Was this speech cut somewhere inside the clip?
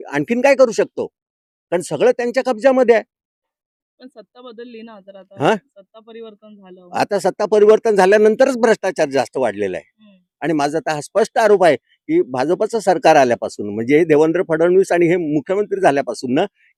no; 0 cuts

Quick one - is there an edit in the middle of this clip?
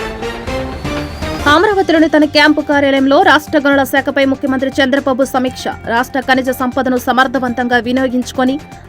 yes; 1 cut; at 1.3 s

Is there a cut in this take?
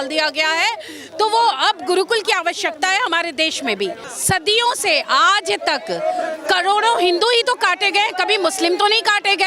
yes; 1 cut; at 4.1 s

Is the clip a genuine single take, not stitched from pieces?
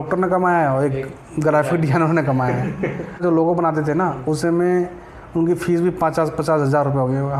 no; 1 cut; at 3.2 s

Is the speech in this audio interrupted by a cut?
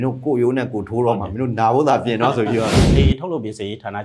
yes; 1 cut; at 2.8 s

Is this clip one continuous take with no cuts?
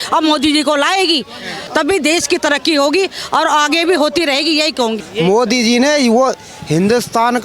no; 2 cuts; at 1.7 s, 5.0 s

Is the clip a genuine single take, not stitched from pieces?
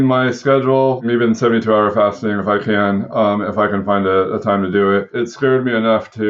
no; 2 cuts; at 1.0 s, 5.2 s

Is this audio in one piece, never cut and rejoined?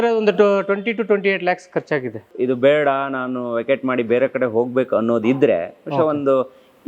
no; 1 cut; at 2.3 s

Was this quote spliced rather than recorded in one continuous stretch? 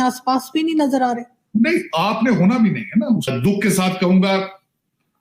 yes; 1 cut; at 3.3 s

